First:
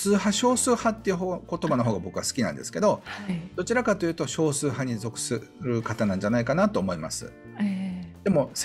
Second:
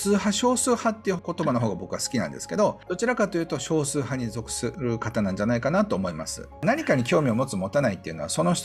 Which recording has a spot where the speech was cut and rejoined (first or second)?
second